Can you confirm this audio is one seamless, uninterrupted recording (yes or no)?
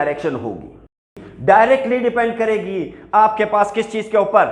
no